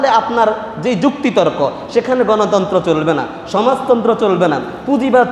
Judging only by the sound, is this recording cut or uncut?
uncut